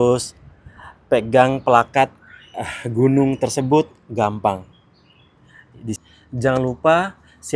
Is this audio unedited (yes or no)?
no